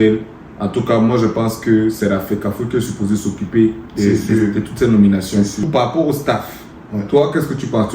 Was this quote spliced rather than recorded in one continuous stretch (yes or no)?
yes